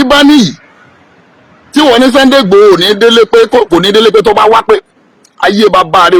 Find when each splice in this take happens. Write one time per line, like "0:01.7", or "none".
none